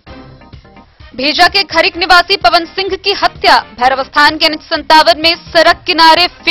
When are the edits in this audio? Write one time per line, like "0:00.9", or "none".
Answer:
0:01.0